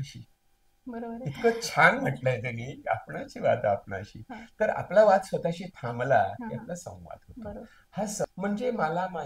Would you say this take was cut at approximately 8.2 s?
yes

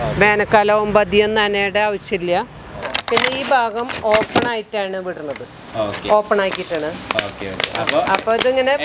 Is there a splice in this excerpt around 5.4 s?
no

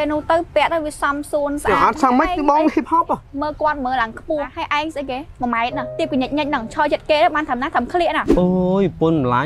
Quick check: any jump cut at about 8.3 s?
yes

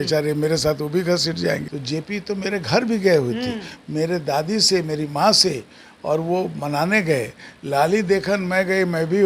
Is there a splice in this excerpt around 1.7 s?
yes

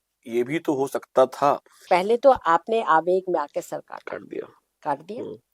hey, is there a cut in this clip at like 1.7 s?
yes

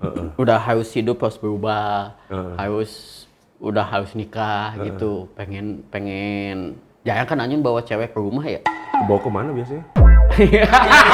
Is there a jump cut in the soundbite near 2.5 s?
no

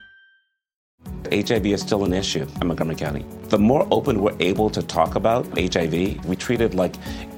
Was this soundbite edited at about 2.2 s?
no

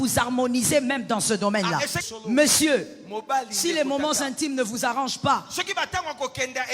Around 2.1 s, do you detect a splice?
yes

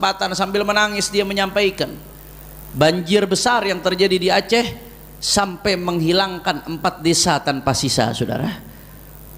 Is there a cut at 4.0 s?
no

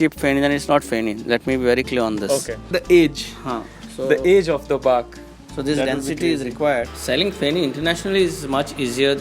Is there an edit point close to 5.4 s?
no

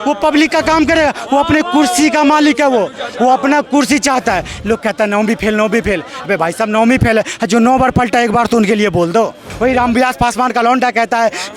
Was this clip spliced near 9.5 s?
yes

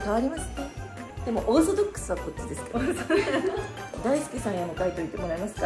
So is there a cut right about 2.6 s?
no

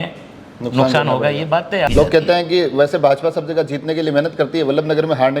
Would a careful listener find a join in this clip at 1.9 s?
yes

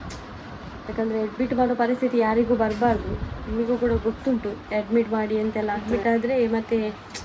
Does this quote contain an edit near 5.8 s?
yes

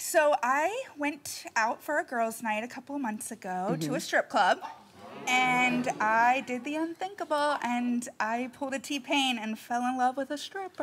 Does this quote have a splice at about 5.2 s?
no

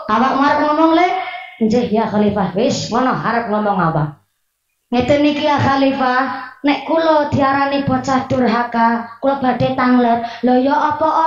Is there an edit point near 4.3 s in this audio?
no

